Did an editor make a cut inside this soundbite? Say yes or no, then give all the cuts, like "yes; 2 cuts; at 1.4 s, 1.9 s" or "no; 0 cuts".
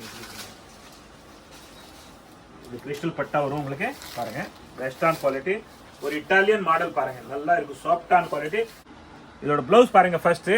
yes; 1 cut; at 8.9 s